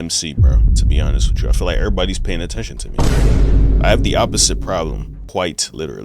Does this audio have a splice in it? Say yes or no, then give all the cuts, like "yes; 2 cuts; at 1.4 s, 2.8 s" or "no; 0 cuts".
yes; 1 cut; at 5.1 s